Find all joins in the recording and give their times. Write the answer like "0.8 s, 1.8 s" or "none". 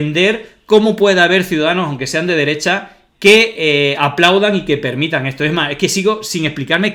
none